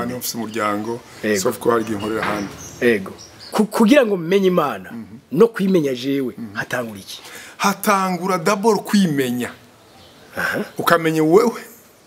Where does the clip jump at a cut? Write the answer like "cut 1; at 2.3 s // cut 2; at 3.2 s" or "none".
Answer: cut 1; at 3.5 s

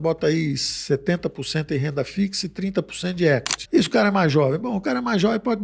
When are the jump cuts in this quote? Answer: cut 1; at 3.5 s

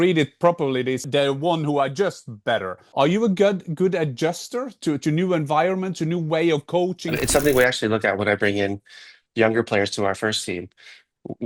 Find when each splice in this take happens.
cut 1; at 1.0 s // cut 2; at 2.8 s // cut 3; at 7.2 s

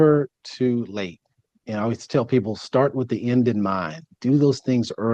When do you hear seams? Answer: none

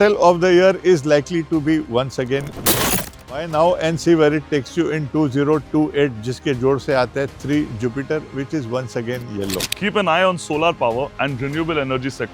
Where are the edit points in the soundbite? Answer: cut 1; at 2.7 s // cut 2; at 9.6 s

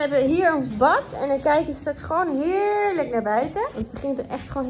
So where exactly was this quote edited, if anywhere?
cut 1; at 3.7 s

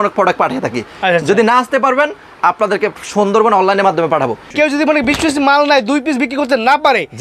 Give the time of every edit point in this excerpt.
cut 1; at 4.5 s

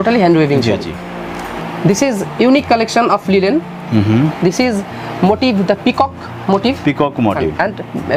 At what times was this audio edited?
cut 1; at 1.5 s

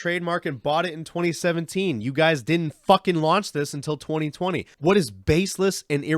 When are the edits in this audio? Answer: cut 1; at 4.7 s

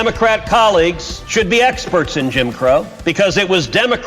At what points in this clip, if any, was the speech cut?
cut 1; at 1.1 s // cut 2; at 2.9 s

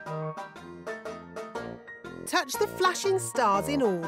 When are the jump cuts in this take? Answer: cut 1; at 2.3 s

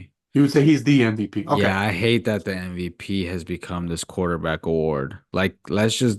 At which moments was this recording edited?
none

